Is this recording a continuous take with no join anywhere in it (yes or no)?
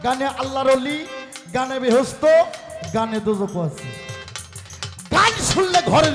yes